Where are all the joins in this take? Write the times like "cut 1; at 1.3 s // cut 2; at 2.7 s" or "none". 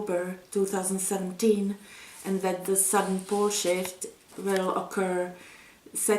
cut 1; at 4.4 s